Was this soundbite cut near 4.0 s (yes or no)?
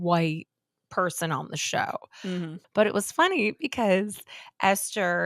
no